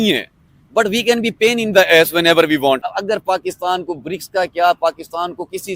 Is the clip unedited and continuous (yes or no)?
no